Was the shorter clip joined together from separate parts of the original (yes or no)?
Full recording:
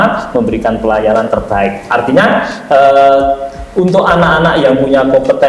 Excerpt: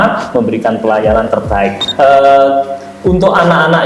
yes